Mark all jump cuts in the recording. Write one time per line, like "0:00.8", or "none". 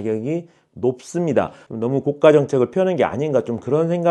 0:01.7